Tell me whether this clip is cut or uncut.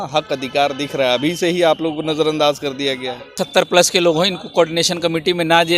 cut